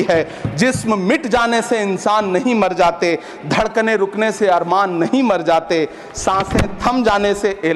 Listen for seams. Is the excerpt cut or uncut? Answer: uncut